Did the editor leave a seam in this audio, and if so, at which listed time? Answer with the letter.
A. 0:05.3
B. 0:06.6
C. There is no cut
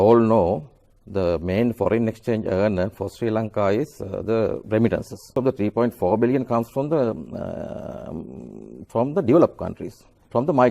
A